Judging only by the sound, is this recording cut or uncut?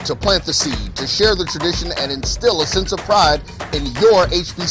cut